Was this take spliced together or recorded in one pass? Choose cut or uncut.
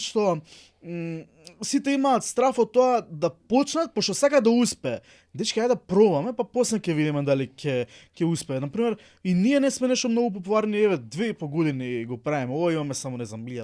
uncut